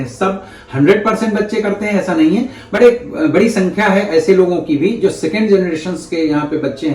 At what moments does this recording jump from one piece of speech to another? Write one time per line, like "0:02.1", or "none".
none